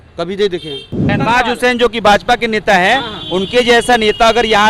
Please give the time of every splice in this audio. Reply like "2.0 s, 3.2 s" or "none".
1.1 s